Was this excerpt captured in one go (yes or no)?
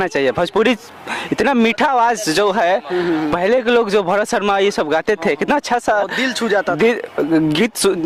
yes